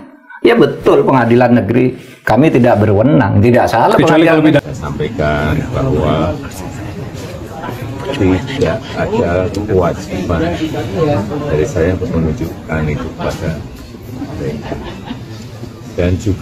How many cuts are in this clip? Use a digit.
1